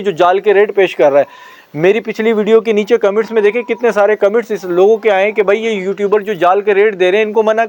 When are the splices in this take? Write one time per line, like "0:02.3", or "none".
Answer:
none